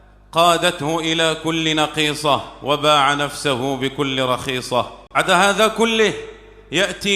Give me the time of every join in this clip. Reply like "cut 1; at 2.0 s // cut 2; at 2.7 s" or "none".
cut 1; at 5.2 s